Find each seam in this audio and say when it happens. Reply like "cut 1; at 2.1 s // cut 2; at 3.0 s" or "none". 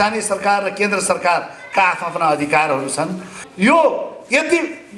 cut 1; at 3.4 s